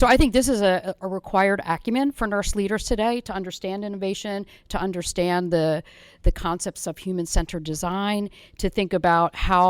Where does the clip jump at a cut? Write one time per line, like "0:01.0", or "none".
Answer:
none